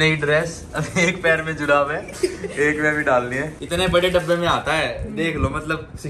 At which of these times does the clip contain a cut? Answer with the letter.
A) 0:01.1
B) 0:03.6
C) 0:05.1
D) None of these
B